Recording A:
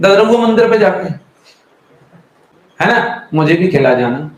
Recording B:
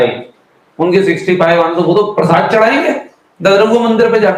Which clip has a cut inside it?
A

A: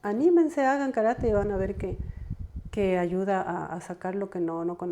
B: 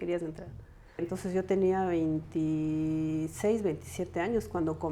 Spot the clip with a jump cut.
B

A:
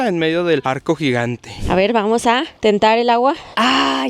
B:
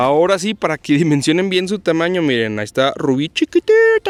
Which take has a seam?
A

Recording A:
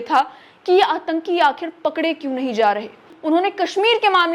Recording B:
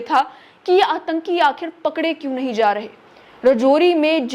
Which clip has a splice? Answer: A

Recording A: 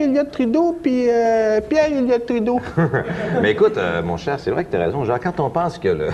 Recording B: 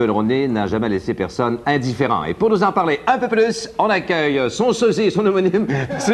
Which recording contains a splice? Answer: A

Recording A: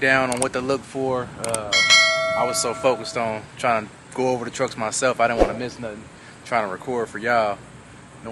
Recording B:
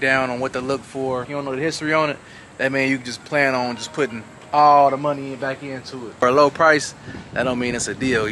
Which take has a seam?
B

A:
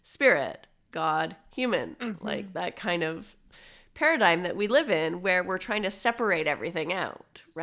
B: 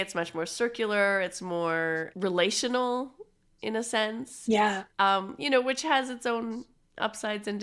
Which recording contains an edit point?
B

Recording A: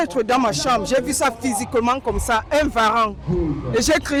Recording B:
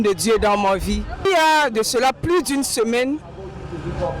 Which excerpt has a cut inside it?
B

